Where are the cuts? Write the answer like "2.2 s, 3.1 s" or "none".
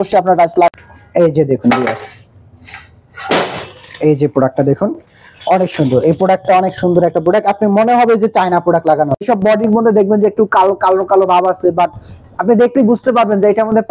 0.7 s, 9.2 s